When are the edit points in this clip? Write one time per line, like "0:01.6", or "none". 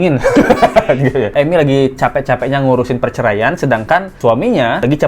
0:01.3